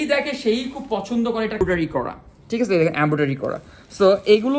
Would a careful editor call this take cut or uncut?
cut